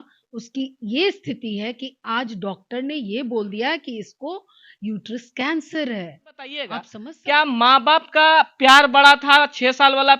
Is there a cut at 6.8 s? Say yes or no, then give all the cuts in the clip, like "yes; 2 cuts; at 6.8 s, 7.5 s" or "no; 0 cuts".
yes; 1 cut; at 6.8 s